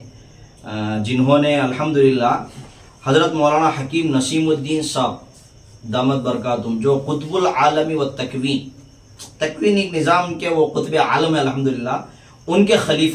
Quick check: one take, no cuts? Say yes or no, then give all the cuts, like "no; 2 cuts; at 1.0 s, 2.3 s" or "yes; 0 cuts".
yes; 0 cuts